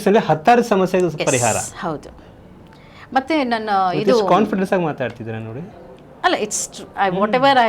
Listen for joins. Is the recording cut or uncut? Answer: uncut